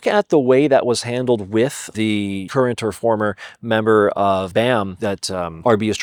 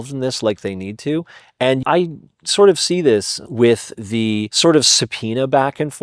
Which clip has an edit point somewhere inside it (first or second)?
second